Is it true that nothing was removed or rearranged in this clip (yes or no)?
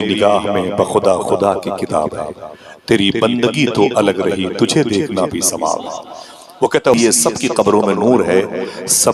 no